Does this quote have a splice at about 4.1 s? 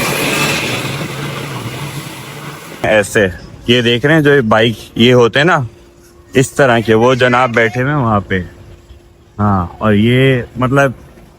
no; 1 cut; at 2.8 s

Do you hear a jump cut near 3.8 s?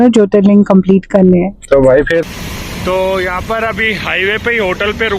no; 1 cut; at 2.2 s

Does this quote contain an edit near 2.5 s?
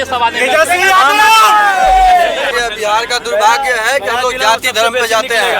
yes; 1 cut; at 2.5 s

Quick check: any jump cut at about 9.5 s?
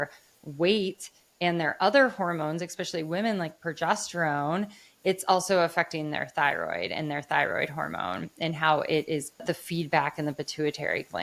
yes; 1 cut; at 9.5 s

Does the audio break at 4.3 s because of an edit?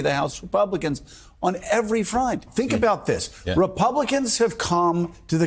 no; 1 cut; at 2.5 s

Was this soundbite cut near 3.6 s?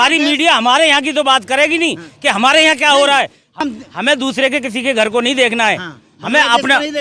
yes; 1 cut; at 3.6 s

